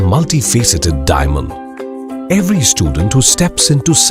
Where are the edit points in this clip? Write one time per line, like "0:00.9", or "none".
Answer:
none